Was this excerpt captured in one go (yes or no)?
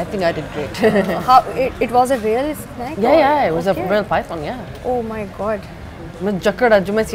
yes